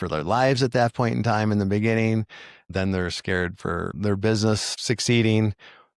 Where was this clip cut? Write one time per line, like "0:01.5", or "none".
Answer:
0:02.7